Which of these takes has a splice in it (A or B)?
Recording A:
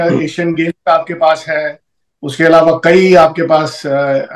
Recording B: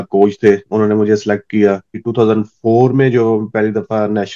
B